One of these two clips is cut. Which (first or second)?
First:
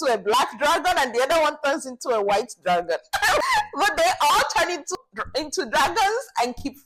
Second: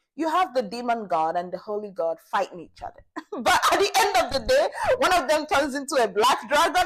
first